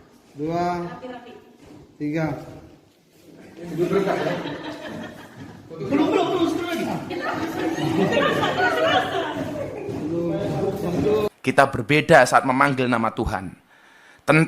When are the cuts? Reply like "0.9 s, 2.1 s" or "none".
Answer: 11.4 s